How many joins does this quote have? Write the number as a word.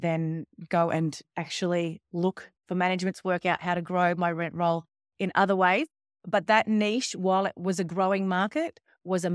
zero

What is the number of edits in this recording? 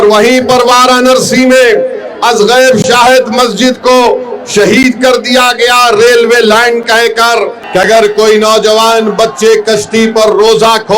one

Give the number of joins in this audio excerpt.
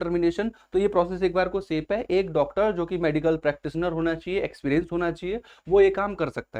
zero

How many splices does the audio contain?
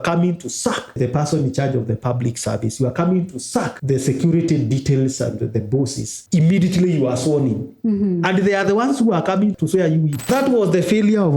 one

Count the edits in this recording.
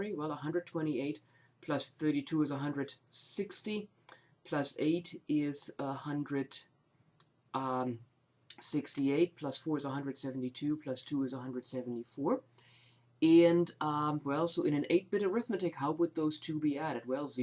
one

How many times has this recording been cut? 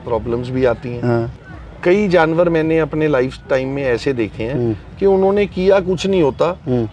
one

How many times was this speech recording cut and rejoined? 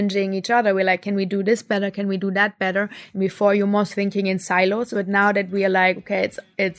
one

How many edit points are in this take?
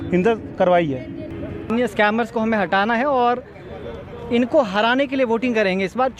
one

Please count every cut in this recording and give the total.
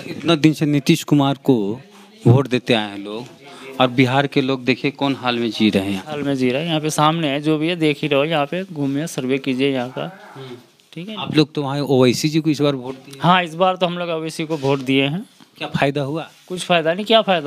zero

